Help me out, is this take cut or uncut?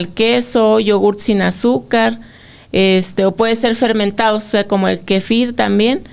uncut